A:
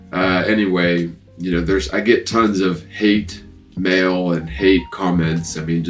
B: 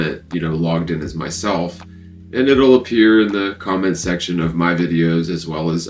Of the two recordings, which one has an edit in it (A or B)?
A